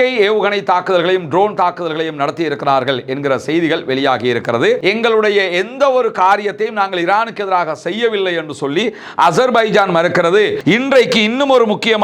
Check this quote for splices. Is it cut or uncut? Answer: cut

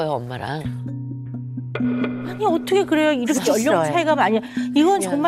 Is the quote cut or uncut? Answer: uncut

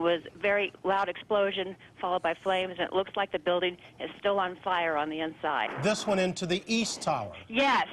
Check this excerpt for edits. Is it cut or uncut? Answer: uncut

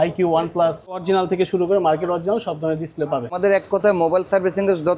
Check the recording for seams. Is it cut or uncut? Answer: cut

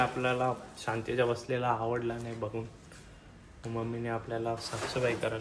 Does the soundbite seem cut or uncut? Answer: uncut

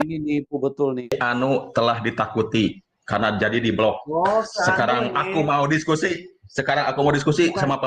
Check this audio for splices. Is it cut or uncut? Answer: cut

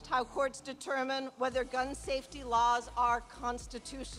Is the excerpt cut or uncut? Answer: uncut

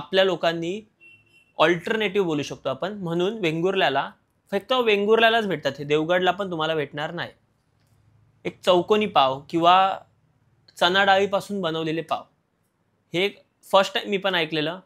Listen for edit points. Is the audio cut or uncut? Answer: uncut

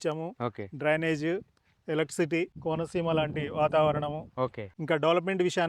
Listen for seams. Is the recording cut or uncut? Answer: cut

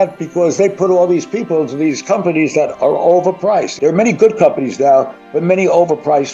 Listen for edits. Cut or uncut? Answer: uncut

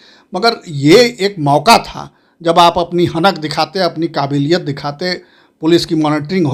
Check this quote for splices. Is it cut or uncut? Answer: uncut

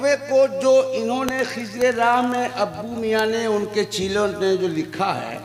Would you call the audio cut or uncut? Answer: uncut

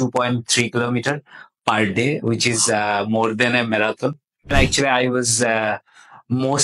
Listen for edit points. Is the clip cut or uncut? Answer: cut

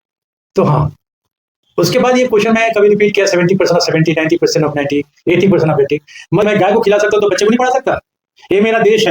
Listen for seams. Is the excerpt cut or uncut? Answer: cut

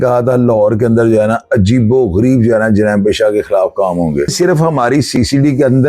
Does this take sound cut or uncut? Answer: cut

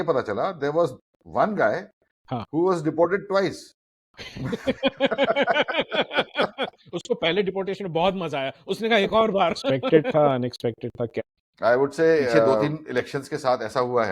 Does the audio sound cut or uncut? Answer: cut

